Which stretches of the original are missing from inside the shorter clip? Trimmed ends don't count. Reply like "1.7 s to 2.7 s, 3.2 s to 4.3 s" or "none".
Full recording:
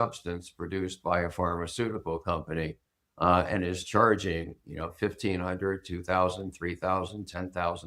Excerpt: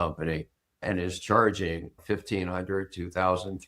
3.1 s to 3.5 s, 4.6 s to 4.9 s